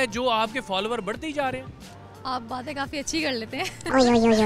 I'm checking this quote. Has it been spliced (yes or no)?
no